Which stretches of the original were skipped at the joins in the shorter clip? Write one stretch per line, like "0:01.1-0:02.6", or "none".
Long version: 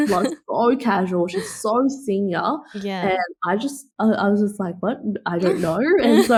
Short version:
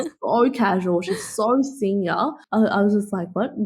0:02.7-0:03.9

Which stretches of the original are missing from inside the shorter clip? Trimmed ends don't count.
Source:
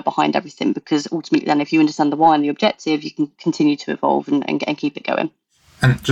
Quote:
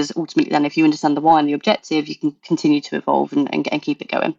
none

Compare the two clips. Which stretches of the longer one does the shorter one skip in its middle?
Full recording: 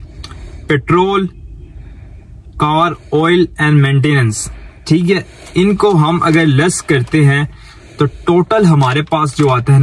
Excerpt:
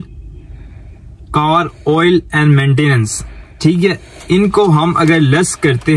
none

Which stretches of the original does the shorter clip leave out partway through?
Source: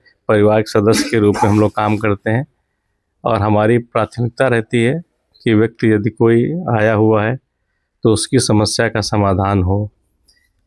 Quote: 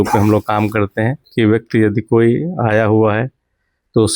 0:02.5-0:05.3

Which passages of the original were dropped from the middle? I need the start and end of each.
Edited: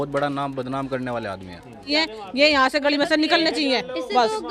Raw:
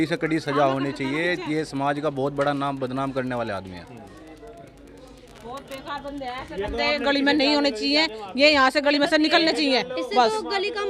0:04.1-0:07.9

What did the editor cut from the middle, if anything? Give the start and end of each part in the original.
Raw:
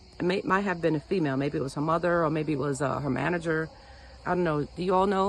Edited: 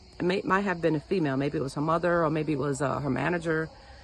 none

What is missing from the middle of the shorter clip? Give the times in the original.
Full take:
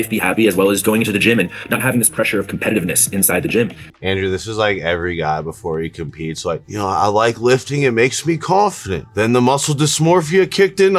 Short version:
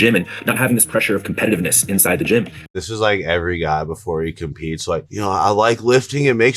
0:04.0-0:04.3

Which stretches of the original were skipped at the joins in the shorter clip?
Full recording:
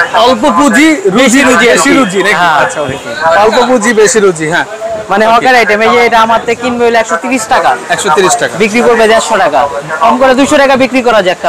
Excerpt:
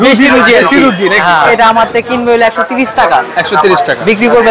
0:02.7-0:06.1

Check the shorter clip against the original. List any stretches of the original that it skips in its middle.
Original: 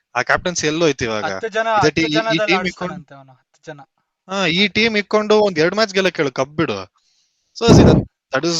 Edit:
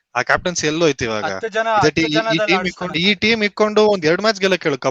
0:03.0-0:04.5

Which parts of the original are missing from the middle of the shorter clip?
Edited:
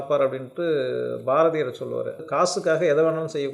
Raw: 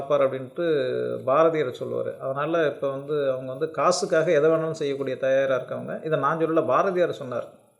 0:02.2-0:03.6

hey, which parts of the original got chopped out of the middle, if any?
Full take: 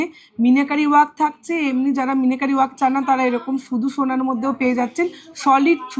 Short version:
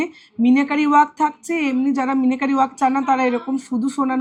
none

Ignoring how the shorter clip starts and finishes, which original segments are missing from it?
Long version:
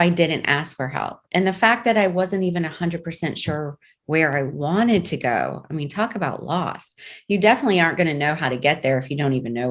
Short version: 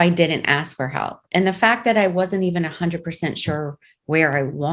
none

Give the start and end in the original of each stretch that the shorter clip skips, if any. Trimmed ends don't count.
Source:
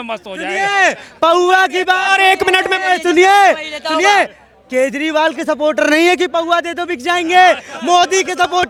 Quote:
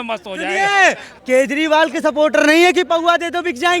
0:01.0-0:04.5

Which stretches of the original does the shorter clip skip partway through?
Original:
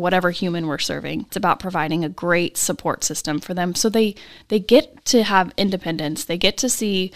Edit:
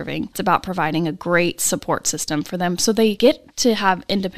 0:04.1-0:04.7

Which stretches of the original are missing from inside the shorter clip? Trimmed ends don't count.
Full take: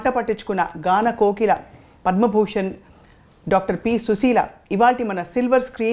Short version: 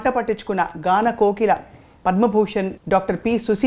0:02.8-0:03.4

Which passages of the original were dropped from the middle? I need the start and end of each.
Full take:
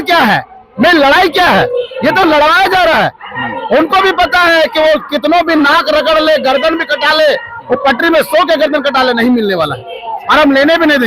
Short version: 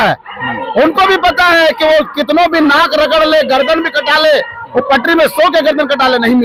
none

